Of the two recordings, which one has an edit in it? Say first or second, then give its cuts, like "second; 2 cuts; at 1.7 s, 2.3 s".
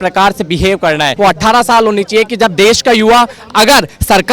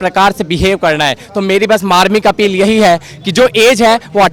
first; 1 cut; at 1.1 s